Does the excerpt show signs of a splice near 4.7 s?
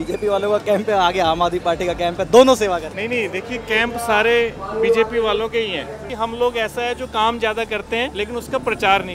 no; 3 cuts; at 2.9 s, 6.1 s, 8.1 s

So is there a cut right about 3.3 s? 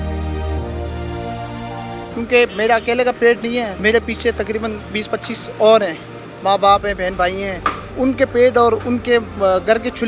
no; 2 cuts; at 1.9 s, 7.9 s

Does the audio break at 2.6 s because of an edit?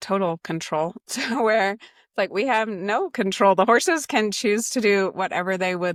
no; 0 cuts

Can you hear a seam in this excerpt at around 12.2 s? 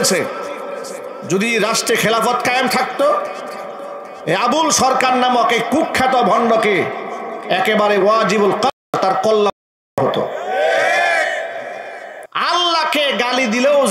yes; 1 cut; at 12.2 s

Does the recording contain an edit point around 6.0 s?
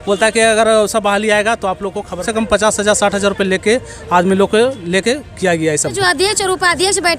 yes; 2 cuts; at 2.3 s, 6.0 s

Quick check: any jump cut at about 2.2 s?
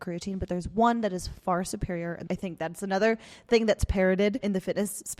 yes; 1 cut; at 2.2 s

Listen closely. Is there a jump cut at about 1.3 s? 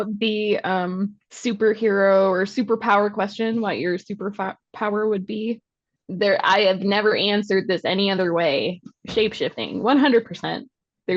yes; 1 cut; at 1.3 s

